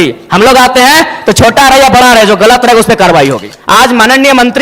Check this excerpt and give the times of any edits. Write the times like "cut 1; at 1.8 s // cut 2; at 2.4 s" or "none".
cut 1; at 3.5 s

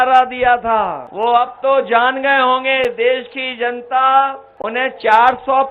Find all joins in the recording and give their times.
cut 1; at 1.0 s // cut 2; at 4.5 s

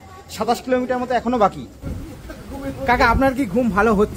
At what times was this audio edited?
cut 1; at 1.8 s

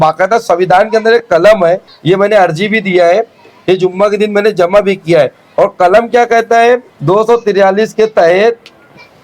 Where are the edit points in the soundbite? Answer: cut 1; at 1.9 s // cut 2; at 6.9 s

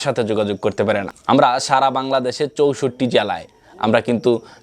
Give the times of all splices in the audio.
cut 1; at 1.2 s

